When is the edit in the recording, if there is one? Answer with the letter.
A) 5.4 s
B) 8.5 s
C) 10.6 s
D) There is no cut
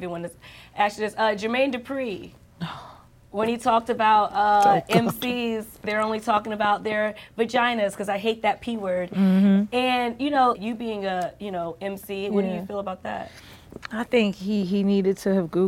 C